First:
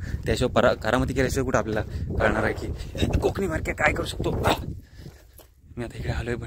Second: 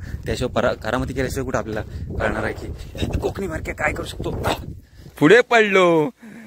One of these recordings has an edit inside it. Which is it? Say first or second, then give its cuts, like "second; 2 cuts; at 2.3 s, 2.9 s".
second; 1 cut; at 5.2 s